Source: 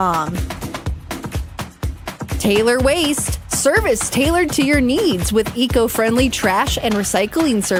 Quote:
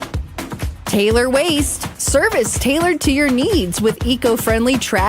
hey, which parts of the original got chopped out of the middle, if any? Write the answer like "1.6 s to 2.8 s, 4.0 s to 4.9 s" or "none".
1.6 s to 2.4 s